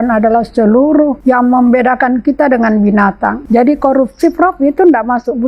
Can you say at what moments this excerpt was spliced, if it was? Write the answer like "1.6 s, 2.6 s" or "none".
1.2 s, 3.4 s